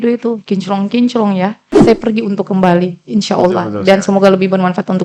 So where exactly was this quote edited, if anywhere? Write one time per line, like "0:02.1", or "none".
0:01.7